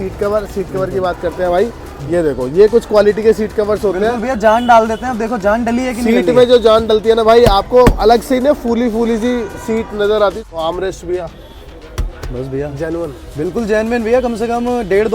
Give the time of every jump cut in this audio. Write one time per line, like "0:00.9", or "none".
0:10.4